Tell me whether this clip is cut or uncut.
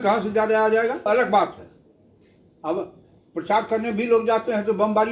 cut